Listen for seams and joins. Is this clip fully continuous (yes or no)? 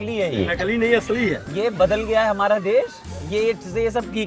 yes